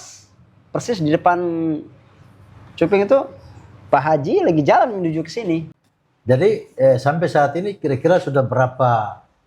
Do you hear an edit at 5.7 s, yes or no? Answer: yes